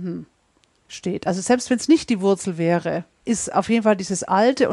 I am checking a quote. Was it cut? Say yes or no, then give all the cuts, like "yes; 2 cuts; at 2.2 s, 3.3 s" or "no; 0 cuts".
yes; 1 cut; at 3.1 s